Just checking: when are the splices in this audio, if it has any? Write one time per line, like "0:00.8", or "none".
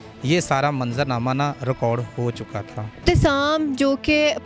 0:03.0